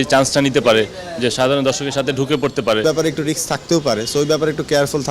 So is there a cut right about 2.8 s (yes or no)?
yes